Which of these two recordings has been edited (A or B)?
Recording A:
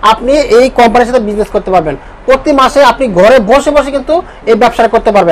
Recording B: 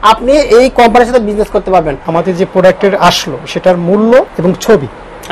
B